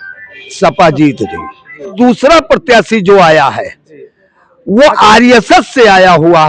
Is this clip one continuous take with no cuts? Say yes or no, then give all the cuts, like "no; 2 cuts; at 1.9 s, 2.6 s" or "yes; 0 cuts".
no; 1 cut; at 1.9 s